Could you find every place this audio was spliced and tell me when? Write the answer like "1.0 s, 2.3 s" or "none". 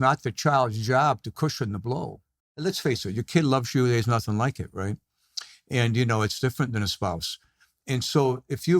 2.5 s

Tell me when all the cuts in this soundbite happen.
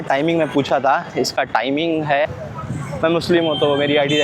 2.2 s

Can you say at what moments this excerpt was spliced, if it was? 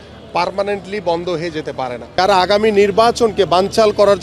2.0 s

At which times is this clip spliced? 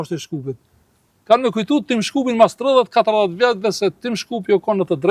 none

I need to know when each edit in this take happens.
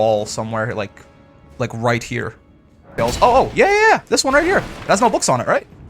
2.9 s

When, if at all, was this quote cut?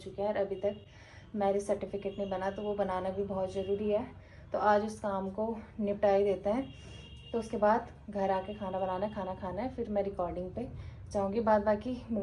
none

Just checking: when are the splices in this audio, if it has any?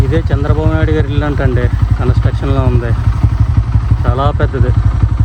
none

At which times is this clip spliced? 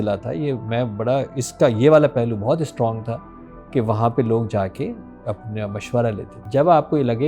6.4 s

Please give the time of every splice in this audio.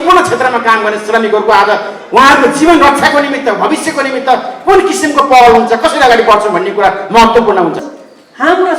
7.8 s

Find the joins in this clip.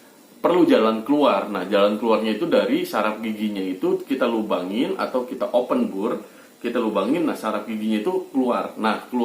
none

